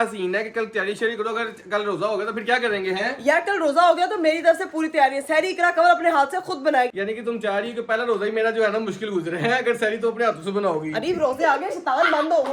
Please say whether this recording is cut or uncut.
cut